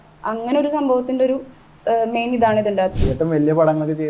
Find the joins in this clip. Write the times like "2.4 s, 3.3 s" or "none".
2.9 s